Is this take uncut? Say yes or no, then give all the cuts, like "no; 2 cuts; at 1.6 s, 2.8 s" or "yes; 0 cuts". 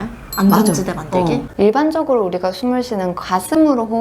no; 1 cut; at 1.5 s